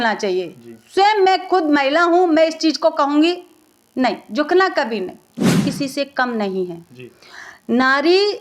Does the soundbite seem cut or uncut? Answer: cut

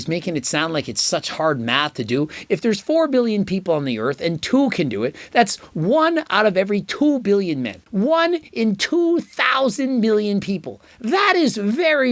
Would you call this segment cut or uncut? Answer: cut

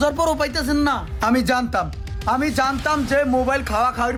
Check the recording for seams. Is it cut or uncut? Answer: uncut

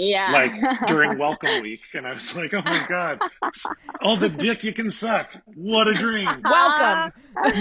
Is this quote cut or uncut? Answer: uncut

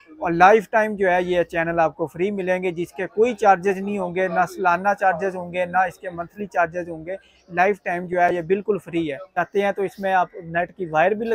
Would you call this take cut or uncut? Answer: cut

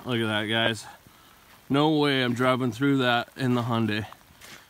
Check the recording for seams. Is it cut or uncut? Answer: uncut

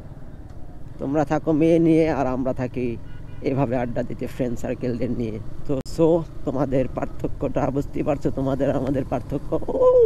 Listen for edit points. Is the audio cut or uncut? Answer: uncut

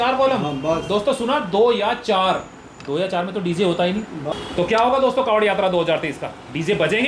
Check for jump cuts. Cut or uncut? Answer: cut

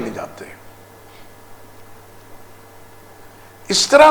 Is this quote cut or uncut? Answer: uncut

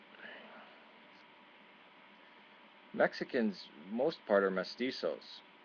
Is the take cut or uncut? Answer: uncut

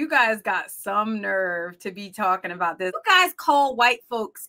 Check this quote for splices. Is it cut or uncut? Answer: cut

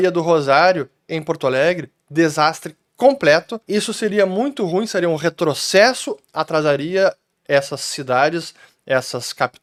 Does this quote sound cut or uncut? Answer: uncut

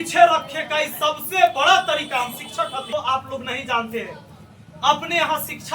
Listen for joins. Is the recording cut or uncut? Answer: cut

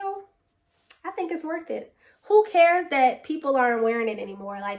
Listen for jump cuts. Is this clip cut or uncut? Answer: uncut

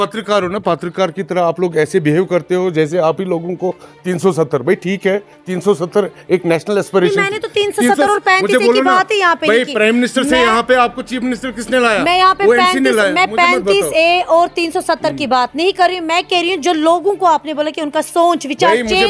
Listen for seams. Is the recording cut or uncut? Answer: uncut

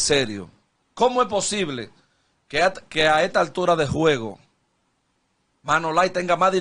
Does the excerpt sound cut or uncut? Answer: uncut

